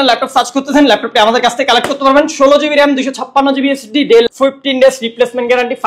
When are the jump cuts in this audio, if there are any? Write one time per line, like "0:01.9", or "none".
0:04.3